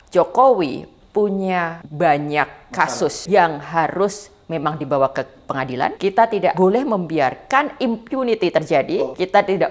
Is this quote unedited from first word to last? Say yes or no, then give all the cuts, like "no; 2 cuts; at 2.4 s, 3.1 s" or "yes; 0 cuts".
no; 4 cuts; at 1.8 s, 3.2 s, 6.4 s, 9.0 s